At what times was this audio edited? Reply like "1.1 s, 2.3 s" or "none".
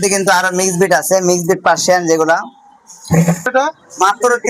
3.5 s